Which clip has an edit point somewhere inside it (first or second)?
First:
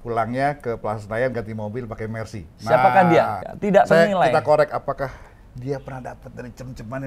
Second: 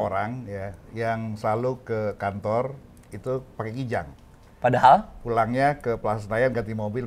first